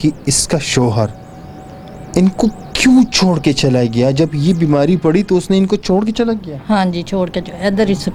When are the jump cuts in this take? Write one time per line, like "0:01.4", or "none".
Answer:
none